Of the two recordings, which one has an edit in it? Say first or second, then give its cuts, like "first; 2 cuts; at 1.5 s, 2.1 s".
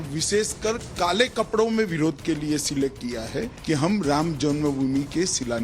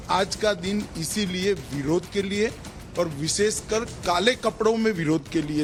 first; 1 cut; at 3.5 s